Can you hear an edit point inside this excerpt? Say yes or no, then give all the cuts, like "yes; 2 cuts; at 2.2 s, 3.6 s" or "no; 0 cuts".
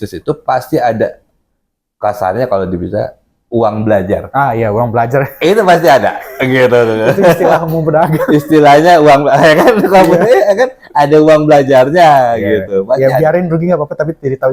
no; 0 cuts